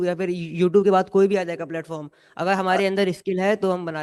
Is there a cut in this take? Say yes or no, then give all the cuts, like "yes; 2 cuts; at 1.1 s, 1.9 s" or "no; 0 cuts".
no; 0 cuts